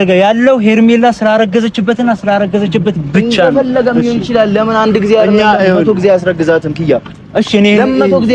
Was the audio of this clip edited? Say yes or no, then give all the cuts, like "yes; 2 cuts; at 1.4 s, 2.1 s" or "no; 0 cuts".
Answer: no; 0 cuts